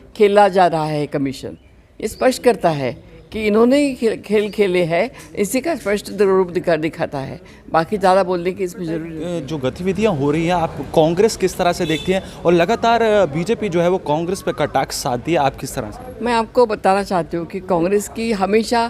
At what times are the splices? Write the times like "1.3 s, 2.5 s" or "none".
9.2 s